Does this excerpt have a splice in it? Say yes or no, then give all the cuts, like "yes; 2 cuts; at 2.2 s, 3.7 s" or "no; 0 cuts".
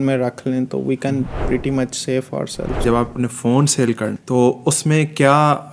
yes; 1 cut; at 2.8 s